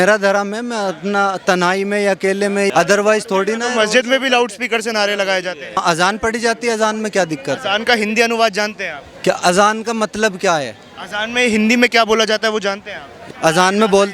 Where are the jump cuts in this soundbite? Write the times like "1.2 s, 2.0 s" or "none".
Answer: 2.7 s, 5.8 s, 13.2 s